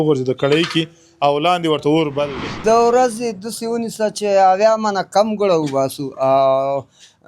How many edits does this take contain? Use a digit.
1